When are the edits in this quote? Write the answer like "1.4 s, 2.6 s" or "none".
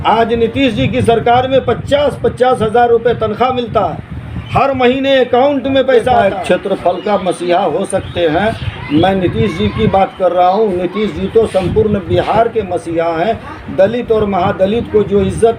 6.2 s